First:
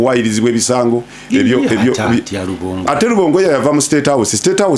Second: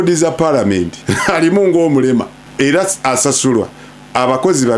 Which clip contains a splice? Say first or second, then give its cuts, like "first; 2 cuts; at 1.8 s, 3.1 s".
second; 2 cuts; at 1.0 s, 2.4 s